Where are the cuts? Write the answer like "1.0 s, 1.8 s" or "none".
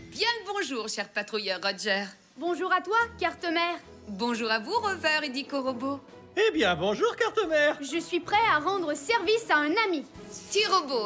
none